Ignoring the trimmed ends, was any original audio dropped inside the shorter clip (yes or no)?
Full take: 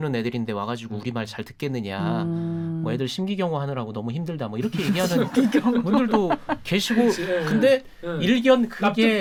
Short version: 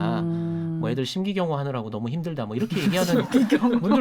no